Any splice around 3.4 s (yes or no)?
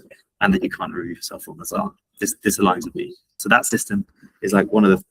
yes